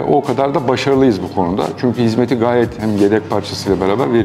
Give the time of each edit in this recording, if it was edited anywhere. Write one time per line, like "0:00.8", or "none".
none